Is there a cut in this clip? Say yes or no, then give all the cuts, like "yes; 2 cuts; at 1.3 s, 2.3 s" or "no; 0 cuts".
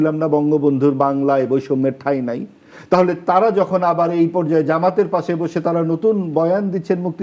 no; 0 cuts